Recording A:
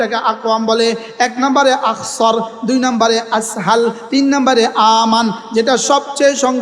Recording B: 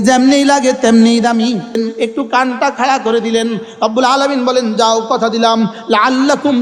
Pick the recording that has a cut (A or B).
B